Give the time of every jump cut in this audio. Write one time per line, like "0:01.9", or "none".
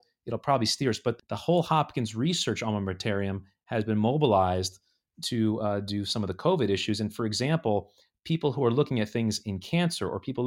0:01.2